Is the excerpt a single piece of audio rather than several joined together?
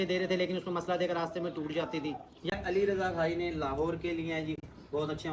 no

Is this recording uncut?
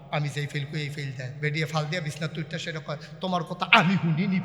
no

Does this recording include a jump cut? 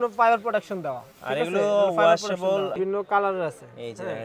yes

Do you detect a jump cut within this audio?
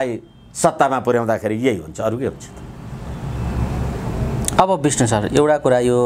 no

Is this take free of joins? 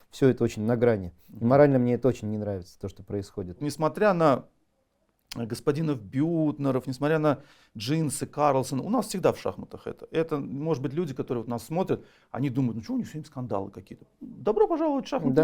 no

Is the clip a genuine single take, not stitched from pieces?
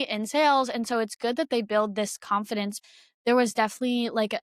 no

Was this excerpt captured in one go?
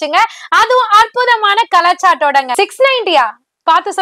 no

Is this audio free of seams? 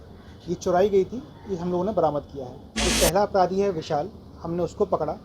no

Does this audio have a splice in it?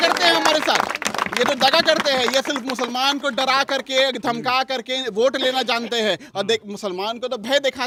no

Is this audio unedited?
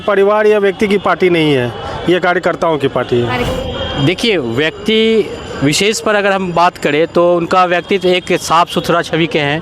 no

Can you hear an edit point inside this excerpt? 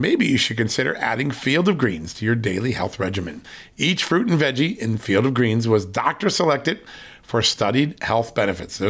no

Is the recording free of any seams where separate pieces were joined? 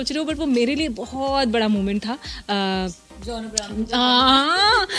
yes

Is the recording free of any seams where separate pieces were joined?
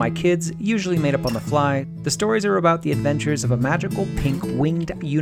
no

